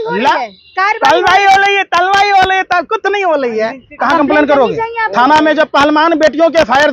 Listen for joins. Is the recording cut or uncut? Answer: cut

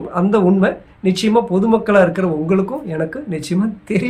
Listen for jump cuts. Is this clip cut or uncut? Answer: uncut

